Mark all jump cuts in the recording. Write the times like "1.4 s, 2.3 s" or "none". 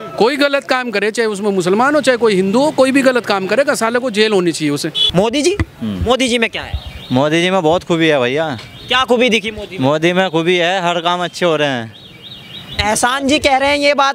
5.0 s